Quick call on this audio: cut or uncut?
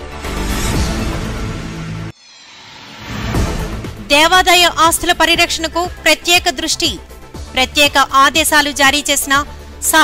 cut